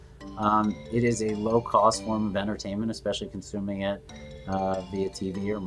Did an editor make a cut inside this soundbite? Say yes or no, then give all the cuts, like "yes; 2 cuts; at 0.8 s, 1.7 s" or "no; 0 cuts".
no; 0 cuts